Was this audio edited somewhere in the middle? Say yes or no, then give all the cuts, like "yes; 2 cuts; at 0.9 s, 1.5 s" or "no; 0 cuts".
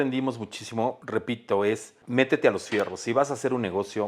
yes; 2 cuts; at 1.0 s, 1.9 s